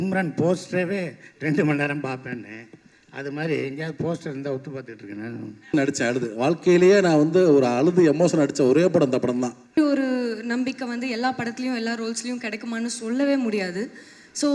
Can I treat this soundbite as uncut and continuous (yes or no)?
no